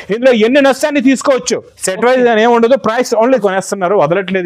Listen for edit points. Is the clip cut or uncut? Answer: cut